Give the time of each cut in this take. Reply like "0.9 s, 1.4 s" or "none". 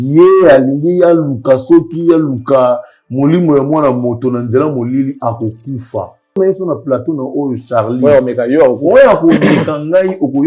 6.4 s